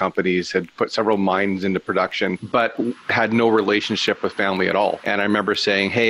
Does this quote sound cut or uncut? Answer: cut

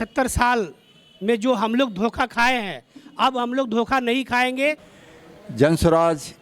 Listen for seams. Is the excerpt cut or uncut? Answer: cut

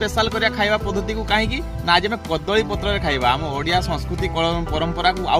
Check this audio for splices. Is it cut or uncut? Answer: uncut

